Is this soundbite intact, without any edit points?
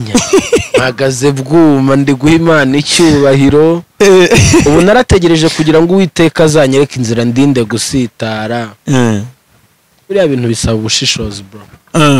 yes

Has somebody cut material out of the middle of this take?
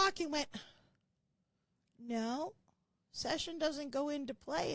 no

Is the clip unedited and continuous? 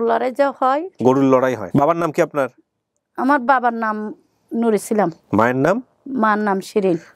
no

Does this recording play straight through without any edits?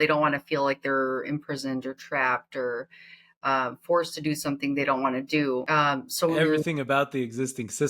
no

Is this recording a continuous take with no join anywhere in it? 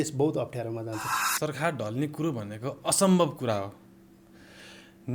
no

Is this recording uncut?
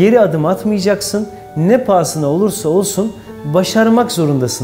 yes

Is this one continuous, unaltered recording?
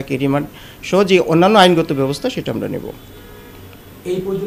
yes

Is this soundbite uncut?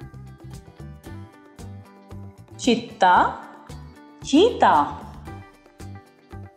no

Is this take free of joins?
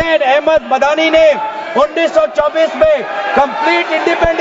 yes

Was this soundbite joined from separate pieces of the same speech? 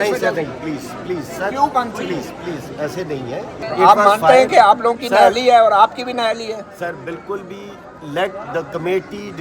yes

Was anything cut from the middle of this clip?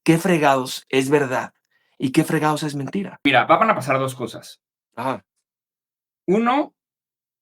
yes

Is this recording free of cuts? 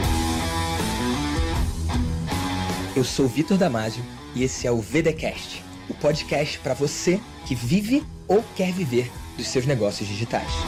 yes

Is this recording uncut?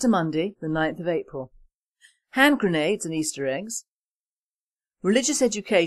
no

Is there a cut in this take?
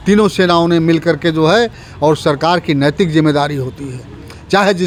no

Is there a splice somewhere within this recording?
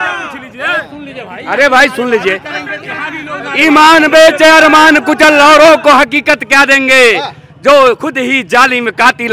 no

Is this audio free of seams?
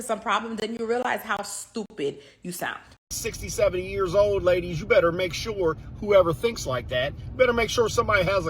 no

